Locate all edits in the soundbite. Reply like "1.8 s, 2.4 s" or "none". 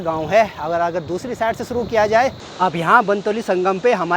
2.4 s

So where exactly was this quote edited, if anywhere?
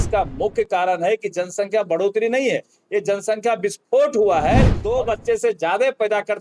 4.8 s

